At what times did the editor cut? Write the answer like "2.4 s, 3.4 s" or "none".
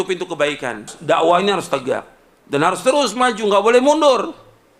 0.9 s